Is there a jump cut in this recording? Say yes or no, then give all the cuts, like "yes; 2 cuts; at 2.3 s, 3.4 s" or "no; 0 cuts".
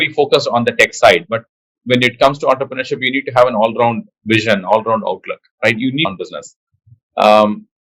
yes; 1 cut; at 6.1 s